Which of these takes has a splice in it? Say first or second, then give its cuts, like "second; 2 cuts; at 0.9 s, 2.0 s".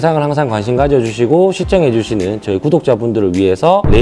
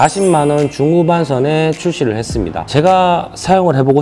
second; 1 cut; at 2.6 s